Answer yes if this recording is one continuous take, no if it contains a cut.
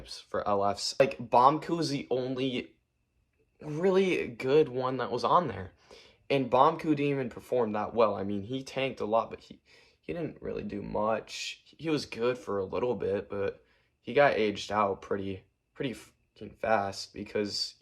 no